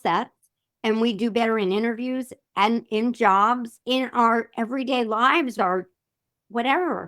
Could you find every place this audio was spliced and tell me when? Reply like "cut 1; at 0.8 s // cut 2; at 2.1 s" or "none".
cut 1; at 3.7 s // cut 2; at 5.5 s